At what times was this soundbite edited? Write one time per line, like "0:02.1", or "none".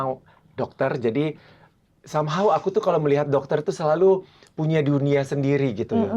none